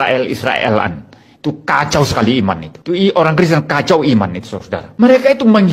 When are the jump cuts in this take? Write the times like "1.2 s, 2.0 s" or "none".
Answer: 4.8 s